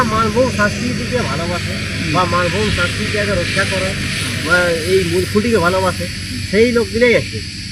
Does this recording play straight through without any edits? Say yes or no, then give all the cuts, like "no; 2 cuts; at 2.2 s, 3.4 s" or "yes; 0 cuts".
yes; 0 cuts